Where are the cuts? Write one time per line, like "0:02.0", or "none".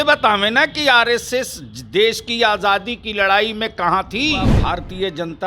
0:04.6